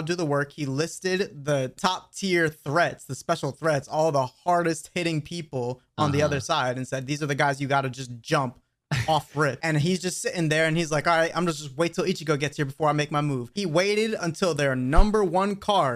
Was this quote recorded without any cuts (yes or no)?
no